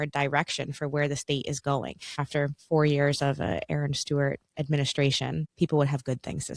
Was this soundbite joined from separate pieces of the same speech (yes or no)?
yes